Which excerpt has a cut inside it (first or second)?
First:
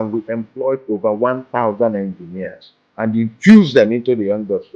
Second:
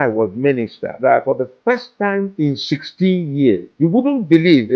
second